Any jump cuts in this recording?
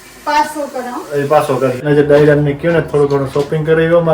yes; 1 cut; at 1.9 s

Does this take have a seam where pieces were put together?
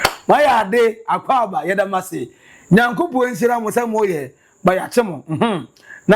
no; 0 cuts

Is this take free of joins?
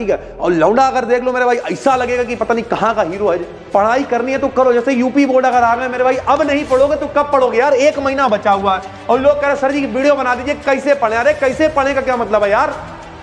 no; 1 cut; at 3.5 s

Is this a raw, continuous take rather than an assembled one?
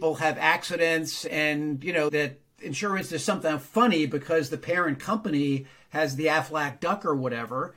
no; 1 cut; at 1.6 s

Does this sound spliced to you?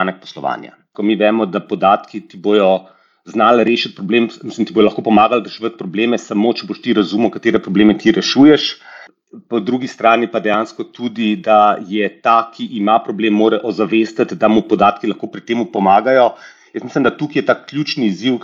yes; 1 cut; at 0.9 s

